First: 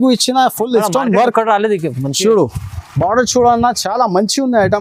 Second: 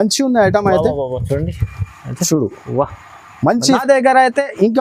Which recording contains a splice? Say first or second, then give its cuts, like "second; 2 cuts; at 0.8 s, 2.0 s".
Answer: second; 1 cut; at 3.8 s